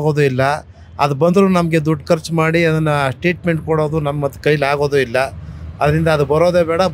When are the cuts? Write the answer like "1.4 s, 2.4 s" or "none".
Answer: none